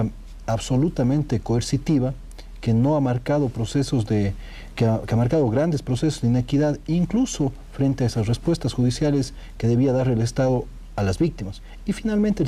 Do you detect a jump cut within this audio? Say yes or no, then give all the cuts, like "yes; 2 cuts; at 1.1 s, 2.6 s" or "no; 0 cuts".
no; 0 cuts